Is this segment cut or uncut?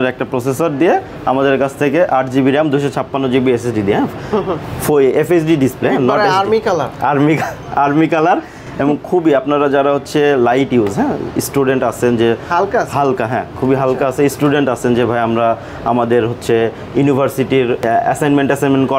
uncut